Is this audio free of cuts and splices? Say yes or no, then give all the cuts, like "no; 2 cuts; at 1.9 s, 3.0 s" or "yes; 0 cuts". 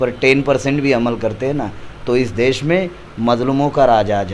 yes; 0 cuts